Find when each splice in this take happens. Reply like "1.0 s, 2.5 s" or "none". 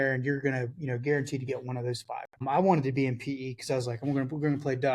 2.4 s